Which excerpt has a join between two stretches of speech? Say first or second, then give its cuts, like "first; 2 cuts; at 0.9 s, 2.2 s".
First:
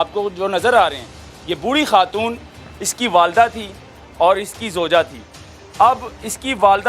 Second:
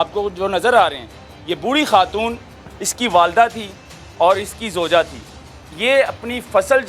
second; 1 cut; at 5.6 s